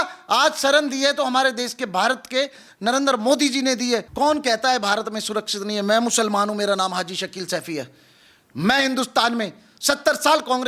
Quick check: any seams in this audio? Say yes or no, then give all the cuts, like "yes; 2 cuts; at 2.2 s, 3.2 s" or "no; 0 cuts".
yes; 1 cut; at 4.1 s